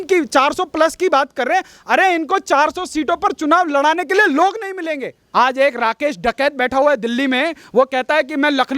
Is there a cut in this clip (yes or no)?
yes